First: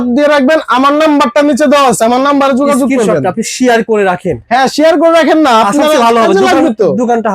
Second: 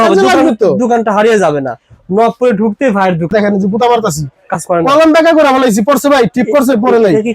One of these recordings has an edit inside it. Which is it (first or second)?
second